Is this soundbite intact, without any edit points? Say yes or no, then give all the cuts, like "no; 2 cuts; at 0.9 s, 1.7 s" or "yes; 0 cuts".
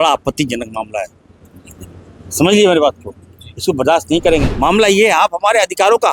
no; 1 cut; at 4.5 s